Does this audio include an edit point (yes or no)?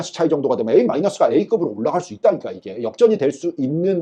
no